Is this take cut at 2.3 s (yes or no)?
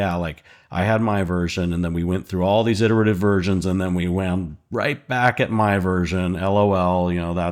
no